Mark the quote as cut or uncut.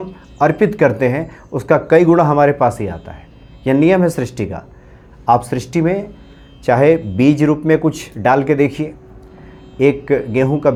uncut